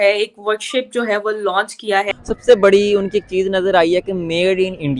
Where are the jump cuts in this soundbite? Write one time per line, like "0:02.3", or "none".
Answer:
0:02.1